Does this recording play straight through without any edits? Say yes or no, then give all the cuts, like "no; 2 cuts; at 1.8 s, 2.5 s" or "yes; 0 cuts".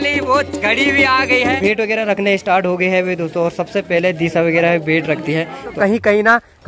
no; 2 cuts; at 1.6 s, 5.8 s